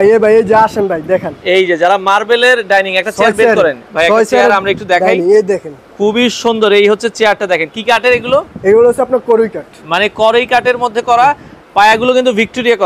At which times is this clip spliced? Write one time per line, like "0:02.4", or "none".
none